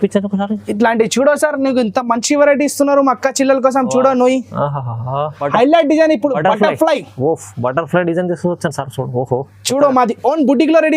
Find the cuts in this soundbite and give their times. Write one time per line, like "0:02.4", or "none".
0:05.4